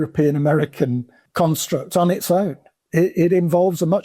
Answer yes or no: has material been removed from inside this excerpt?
yes